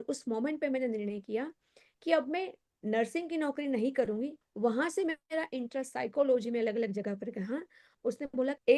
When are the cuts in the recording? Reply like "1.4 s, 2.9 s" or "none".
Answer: 4.4 s, 7.9 s